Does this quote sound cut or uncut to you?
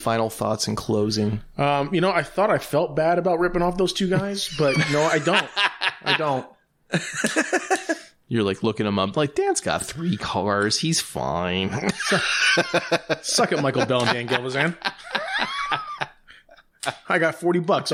uncut